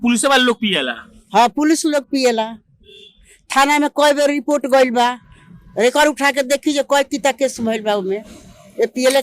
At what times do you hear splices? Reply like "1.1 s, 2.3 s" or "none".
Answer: none